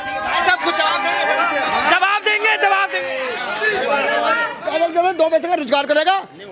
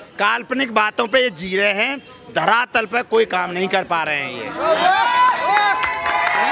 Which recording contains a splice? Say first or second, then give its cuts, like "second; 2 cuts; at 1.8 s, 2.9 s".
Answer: first; 1 cut; at 4.5 s